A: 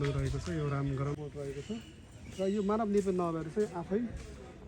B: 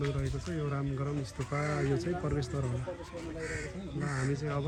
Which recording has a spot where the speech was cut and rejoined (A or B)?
A